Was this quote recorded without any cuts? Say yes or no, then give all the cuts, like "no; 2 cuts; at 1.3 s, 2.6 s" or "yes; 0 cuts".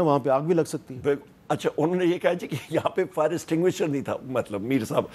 yes; 0 cuts